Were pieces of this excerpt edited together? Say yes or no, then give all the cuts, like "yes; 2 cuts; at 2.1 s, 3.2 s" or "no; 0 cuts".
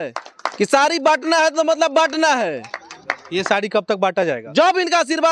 no; 0 cuts